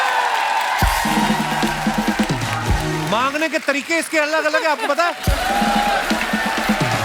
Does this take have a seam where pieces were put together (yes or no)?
yes